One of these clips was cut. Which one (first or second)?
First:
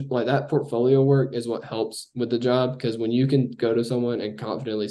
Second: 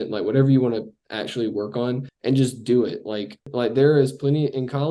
second